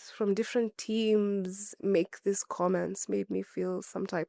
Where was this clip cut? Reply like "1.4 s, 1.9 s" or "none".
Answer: none

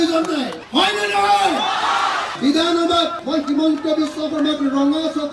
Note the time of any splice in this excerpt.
2.3 s

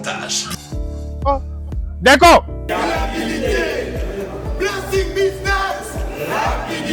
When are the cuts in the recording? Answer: 2.7 s

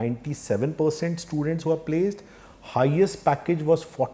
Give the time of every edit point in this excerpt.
none

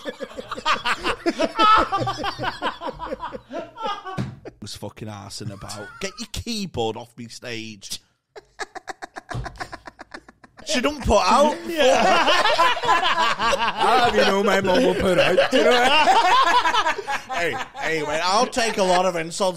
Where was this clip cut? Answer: 4.6 s, 10.7 s

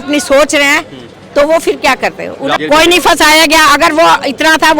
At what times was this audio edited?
2.5 s

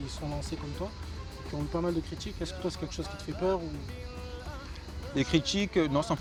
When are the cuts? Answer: none

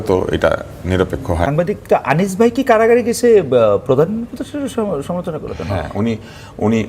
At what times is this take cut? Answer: 1.5 s

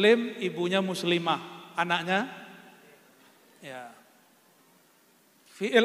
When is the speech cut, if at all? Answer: none

